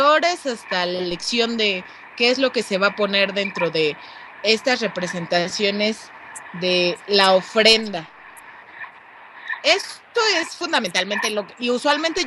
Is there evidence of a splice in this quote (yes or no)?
no